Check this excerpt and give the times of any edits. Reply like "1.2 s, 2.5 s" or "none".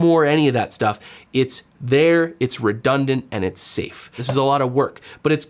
4.2 s